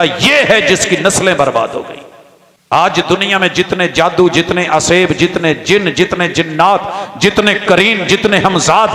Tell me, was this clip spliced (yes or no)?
yes